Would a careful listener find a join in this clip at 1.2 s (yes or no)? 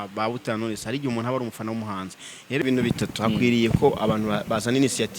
no